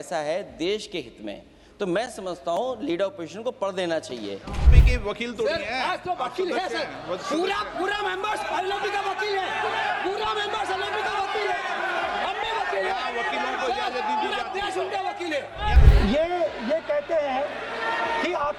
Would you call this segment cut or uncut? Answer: cut